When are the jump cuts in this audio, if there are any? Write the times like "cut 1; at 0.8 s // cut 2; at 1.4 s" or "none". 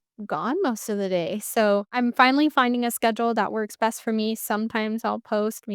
none